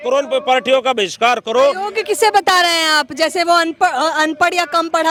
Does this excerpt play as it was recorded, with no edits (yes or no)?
yes